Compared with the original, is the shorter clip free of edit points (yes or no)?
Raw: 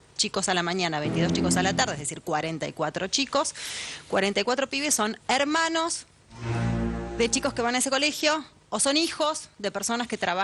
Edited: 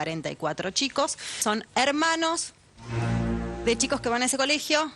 no